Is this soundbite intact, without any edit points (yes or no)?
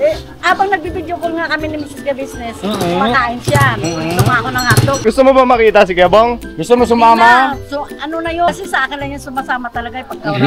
no